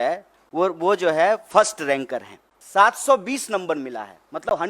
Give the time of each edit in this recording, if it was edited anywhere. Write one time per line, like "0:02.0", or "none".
0:02.5